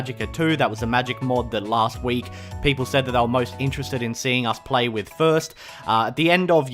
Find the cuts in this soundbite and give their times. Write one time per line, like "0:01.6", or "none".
0:03.2

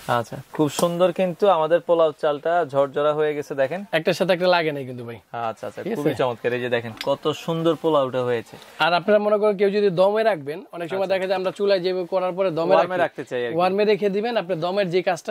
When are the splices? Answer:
none

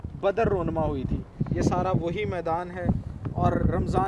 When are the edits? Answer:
none

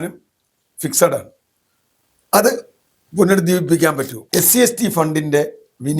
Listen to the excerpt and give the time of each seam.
0:04.1

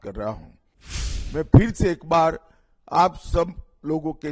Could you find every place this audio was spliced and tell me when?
0:01.1

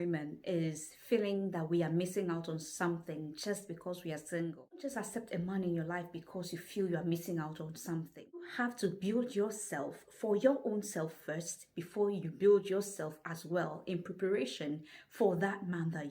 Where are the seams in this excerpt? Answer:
0:04.9
0:08.5

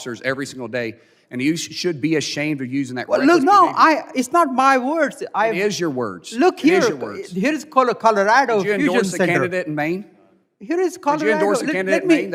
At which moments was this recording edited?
none

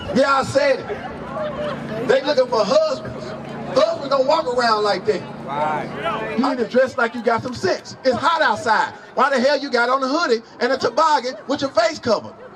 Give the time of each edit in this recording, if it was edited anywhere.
0:06.2

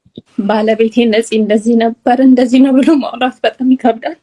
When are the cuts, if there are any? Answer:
none

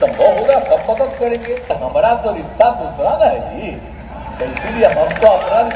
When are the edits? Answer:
0:01.7

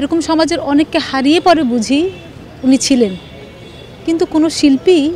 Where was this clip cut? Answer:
none

